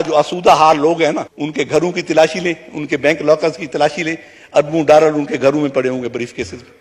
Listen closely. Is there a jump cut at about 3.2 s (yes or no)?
no